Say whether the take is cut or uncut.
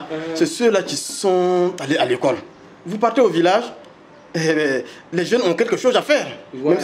uncut